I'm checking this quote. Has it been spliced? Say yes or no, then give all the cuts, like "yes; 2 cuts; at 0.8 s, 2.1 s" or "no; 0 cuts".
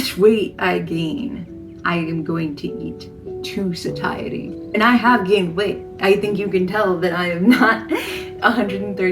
yes; 1 cut; at 4.6 s